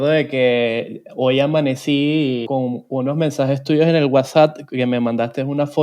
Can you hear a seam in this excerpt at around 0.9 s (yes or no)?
no